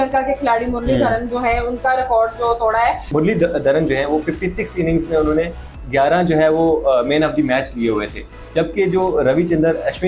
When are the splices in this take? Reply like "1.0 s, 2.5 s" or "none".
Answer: 3.0 s